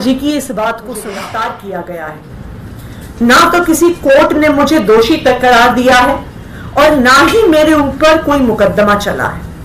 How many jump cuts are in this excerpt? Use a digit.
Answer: 1